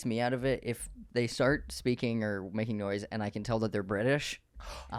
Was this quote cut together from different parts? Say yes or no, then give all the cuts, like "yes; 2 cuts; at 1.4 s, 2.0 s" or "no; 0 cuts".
yes; 1 cut; at 1.0 s